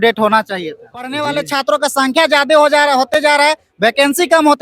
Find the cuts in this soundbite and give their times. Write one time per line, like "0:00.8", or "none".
0:01.2